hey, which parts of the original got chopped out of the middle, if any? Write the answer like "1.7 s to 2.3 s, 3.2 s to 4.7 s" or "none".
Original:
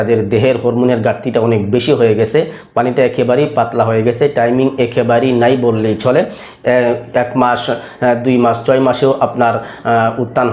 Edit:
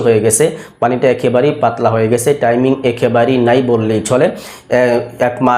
none